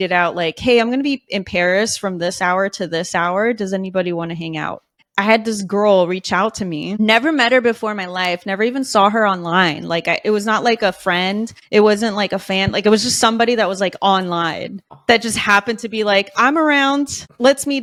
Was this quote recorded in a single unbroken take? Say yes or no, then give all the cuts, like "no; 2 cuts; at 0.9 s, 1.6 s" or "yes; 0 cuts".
yes; 0 cuts